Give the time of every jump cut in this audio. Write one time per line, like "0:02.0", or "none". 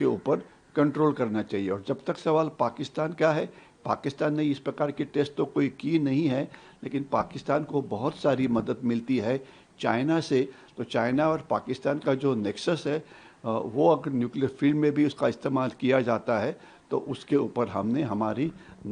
none